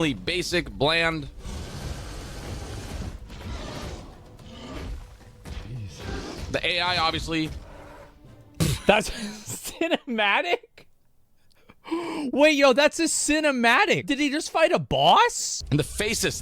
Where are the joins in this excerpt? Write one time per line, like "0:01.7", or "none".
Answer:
0:14.1
0:15.5